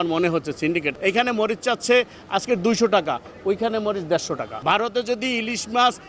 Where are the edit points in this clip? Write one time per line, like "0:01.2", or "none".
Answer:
0:00.9
0:04.5